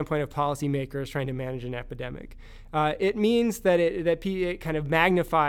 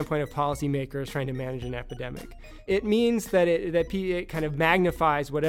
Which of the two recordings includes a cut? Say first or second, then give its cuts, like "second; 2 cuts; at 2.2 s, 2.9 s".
second; 1 cut; at 2.6 s